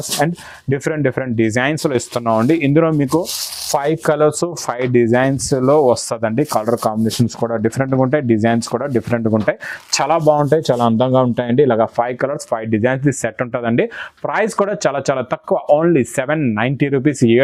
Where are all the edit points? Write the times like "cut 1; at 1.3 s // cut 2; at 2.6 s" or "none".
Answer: none